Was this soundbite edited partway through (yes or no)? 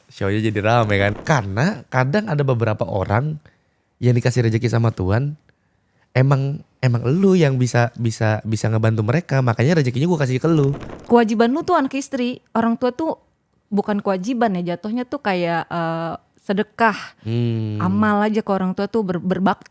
yes